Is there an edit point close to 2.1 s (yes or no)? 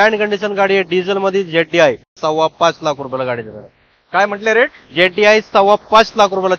yes